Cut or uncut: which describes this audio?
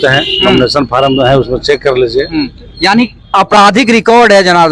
uncut